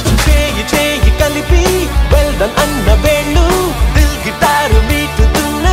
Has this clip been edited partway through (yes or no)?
no